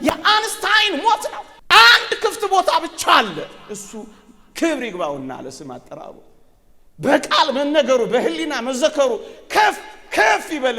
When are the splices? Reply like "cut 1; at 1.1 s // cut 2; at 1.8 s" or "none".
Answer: cut 1; at 1.5 s

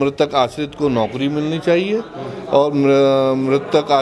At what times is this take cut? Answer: none

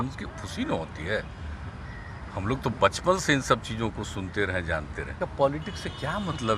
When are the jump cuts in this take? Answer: cut 1; at 5.1 s

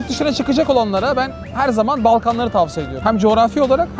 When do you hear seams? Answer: cut 1; at 2.9 s

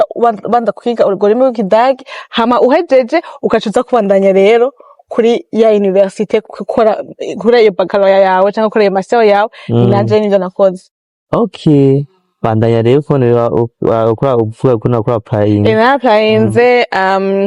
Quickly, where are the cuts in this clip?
none

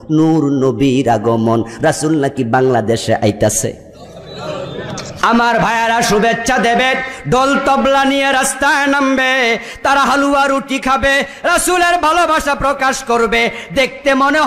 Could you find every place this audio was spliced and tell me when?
cut 1; at 5.2 s

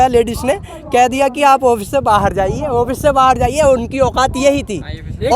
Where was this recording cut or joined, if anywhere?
none

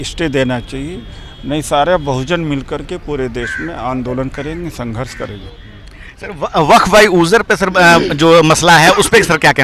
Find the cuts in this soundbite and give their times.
none

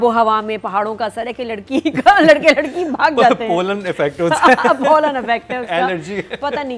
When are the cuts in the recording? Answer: none

